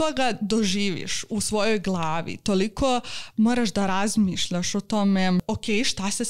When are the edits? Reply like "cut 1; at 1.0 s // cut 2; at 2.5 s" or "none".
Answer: cut 1; at 5.4 s